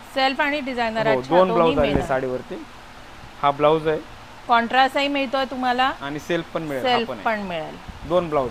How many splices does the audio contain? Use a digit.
0